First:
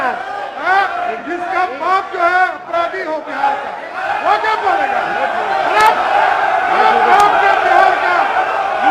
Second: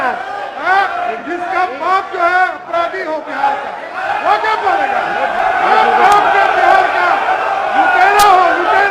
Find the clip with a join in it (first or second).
second